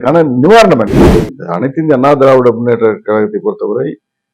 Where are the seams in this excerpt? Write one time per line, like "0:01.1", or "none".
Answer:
0:01.0